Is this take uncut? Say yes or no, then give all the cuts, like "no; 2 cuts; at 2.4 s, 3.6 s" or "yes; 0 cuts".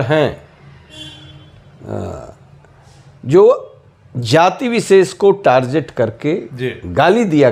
yes; 0 cuts